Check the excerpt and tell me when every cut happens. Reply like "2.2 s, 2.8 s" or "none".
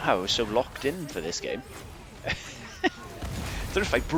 none